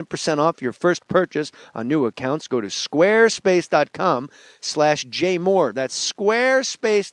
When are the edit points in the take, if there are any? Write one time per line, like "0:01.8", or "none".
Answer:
0:05.4